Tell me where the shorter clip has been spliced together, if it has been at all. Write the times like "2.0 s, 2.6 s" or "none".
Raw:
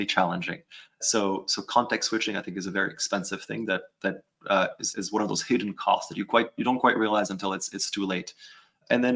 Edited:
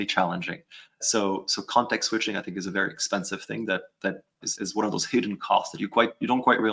4.4 s